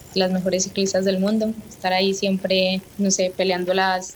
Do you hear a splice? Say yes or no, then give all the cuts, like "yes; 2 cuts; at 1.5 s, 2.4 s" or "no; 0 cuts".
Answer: yes; 1 cut; at 2.9 s